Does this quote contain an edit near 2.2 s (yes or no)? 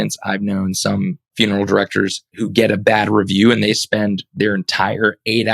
yes